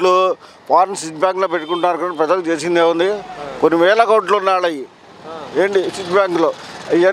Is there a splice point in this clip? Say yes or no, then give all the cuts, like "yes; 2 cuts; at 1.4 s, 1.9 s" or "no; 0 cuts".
no; 0 cuts